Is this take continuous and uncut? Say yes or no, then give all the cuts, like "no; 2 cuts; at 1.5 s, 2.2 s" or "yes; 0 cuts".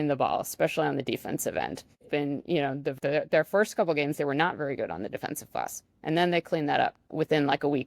no; 3 cuts; at 2.1 s, 3.0 s, 7.1 s